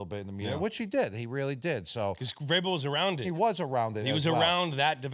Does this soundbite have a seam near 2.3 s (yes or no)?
yes